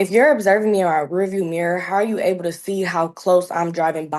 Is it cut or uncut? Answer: uncut